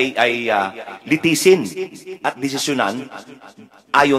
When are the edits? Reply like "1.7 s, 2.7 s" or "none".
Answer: none

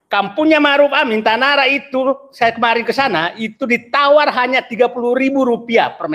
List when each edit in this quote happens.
none

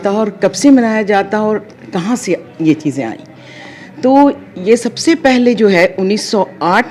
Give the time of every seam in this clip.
none

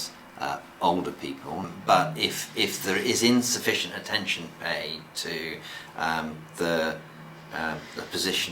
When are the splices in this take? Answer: 1.6 s

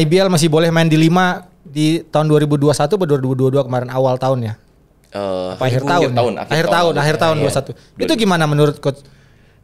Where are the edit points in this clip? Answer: none

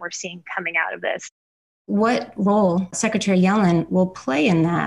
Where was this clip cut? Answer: 1.2 s

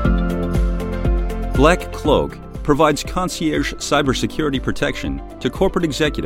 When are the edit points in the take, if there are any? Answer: 1.6 s

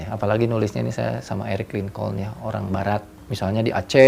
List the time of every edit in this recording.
3.2 s

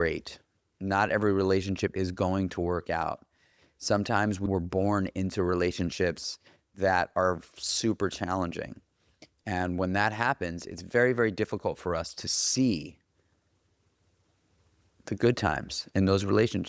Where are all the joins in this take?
4.4 s

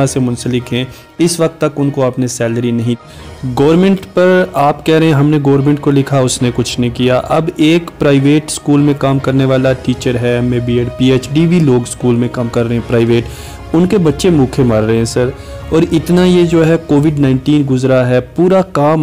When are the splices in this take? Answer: 3.0 s

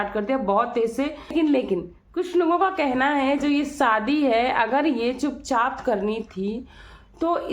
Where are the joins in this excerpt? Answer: 1.3 s

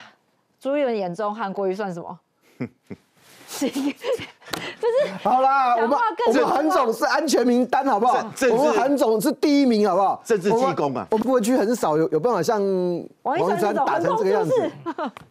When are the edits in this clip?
11.2 s

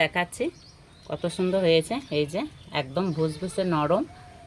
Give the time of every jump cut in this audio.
none

